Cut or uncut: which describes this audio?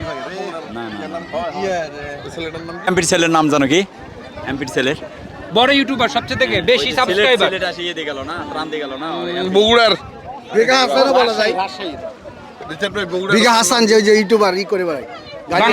cut